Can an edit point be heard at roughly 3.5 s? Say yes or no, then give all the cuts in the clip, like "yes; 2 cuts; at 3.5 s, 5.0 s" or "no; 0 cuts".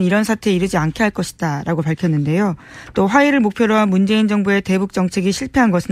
yes; 1 cut; at 3.5 s